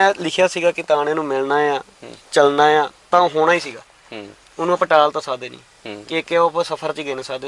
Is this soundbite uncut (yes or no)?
yes